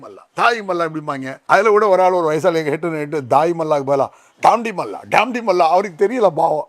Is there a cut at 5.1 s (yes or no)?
no